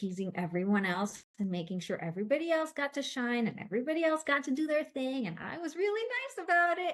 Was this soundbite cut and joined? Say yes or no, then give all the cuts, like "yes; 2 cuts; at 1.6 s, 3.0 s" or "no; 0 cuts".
no; 0 cuts